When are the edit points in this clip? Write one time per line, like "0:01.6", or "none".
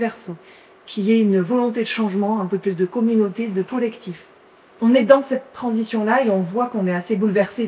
none